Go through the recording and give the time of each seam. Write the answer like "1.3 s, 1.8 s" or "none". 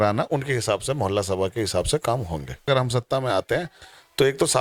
2.7 s